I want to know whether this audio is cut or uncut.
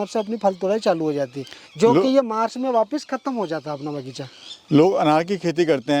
uncut